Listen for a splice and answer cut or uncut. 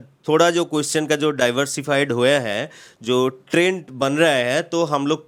uncut